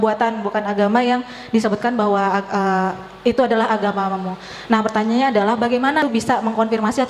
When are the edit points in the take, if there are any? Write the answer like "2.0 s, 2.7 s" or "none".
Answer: 6.0 s